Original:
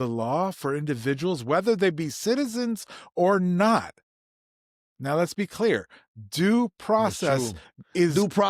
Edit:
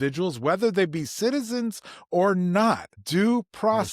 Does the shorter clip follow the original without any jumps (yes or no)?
no